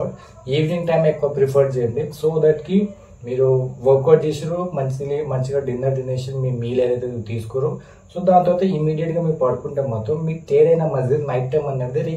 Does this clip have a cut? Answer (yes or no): no